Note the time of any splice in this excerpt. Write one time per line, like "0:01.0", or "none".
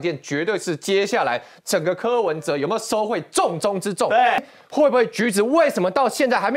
0:04.5